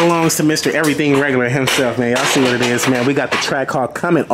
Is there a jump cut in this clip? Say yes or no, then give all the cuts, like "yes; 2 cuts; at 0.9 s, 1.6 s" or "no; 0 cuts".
no; 0 cuts